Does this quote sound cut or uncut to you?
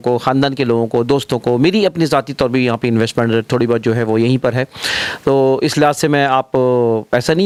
uncut